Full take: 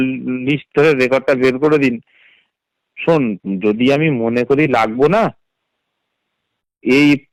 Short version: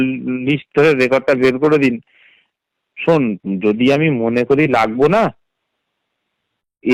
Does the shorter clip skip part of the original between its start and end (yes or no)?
no